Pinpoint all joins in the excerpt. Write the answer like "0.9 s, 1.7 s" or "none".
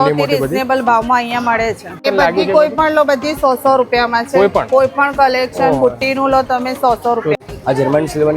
2.0 s, 7.4 s